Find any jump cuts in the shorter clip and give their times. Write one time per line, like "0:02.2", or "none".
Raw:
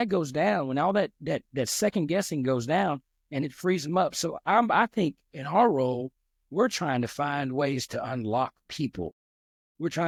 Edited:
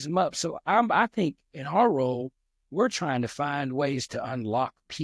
none